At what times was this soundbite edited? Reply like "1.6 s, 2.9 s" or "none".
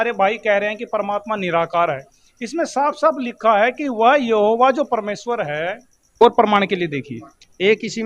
6.2 s